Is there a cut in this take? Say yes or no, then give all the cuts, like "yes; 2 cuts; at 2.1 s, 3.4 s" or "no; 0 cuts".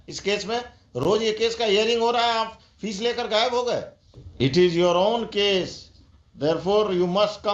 yes; 1 cut; at 4.3 s